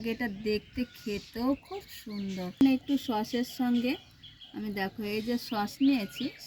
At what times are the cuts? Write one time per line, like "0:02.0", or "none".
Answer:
0:02.6